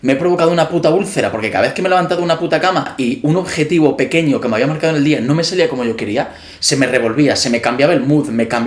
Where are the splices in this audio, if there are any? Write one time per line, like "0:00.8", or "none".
0:02.9